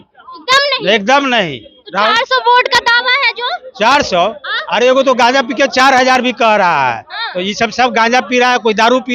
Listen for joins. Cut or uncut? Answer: uncut